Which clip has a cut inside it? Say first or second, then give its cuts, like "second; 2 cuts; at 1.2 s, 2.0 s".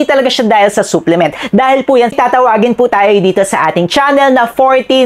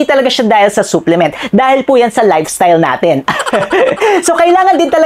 first; 1 cut; at 2.1 s